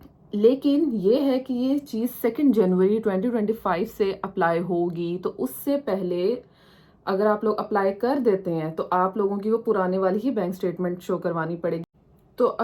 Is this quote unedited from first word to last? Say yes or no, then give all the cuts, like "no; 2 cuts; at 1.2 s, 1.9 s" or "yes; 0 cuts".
yes; 0 cuts